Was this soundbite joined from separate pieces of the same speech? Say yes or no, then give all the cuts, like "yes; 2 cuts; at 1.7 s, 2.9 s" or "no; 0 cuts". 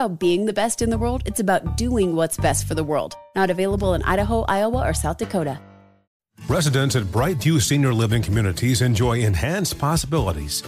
yes; 1 cut; at 6.1 s